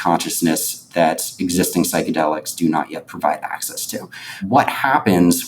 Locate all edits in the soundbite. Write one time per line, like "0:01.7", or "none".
0:04.4